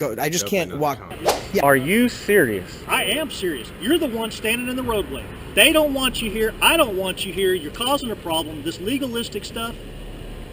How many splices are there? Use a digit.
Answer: 1